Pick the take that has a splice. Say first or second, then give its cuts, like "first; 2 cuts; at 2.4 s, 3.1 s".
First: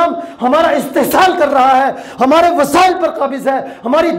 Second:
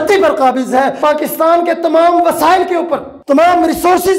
second; 2 cuts; at 1.0 s, 3.1 s